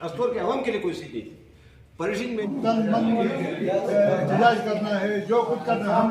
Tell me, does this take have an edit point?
yes; 1 cut; at 2.4 s

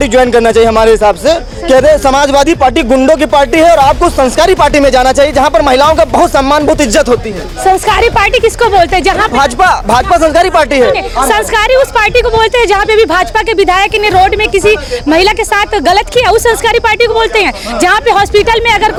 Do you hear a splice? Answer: no; 0 cuts

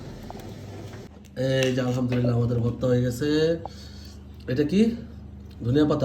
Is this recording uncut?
no; 1 cut; at 1.1 s

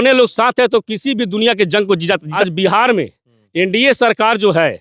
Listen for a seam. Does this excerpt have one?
yes; 1 cut; at 2.3 s

